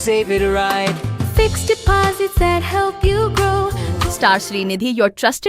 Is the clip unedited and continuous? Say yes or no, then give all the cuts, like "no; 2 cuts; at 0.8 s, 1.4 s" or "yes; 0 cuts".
no; 1 cut; at 3.9 s